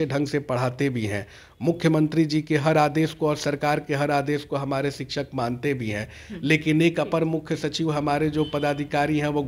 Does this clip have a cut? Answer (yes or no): no